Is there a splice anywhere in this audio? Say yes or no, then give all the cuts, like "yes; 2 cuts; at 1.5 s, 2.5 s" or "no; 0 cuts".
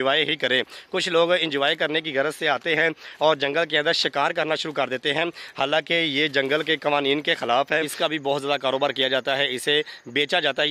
yes; 1 cut; at 7.9 s